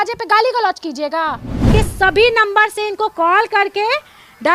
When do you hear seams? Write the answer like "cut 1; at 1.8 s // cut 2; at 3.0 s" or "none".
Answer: cut 1; at 1.7 s